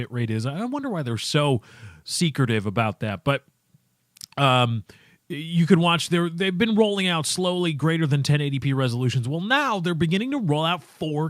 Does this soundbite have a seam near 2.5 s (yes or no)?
no